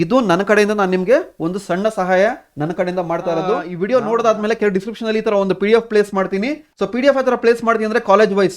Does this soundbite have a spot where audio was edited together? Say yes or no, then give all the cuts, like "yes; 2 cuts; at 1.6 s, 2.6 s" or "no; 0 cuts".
yes; 1 cut; at 3.7 s